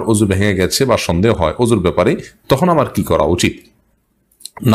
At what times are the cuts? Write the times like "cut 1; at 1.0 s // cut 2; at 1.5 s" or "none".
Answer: none